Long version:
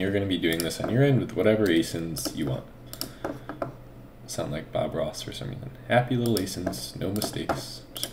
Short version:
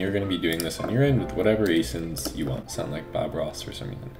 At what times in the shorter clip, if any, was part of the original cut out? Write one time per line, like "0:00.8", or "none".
0:02.7